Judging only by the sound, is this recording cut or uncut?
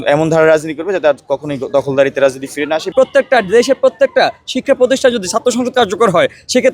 cut